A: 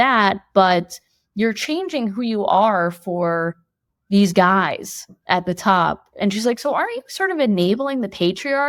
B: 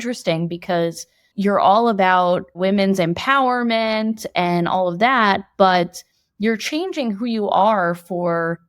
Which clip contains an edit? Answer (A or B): B